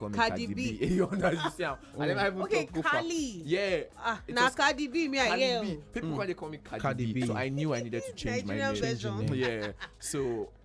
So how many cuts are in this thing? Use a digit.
0